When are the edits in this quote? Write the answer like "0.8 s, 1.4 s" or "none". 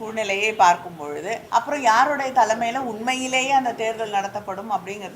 1.4 s